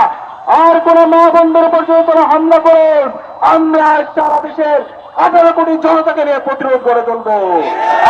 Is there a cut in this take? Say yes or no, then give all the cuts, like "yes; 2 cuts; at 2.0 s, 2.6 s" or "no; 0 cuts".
no; 0 cuts